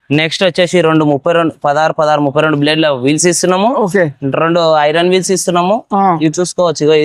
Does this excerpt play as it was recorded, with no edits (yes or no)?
yes